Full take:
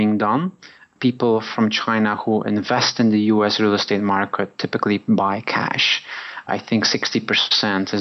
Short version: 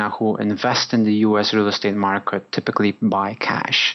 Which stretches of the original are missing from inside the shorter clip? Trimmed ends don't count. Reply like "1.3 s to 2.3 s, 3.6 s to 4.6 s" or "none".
none